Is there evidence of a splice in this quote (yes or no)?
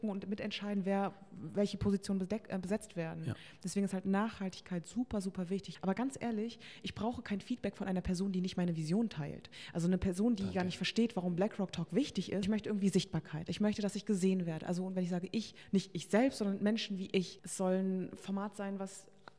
yes